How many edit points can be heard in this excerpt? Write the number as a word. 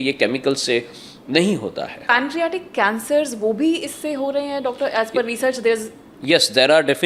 one